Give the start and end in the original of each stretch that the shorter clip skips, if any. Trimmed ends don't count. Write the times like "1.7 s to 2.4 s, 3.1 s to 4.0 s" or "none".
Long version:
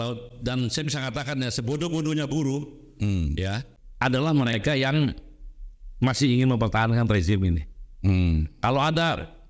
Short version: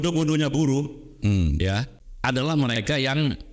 none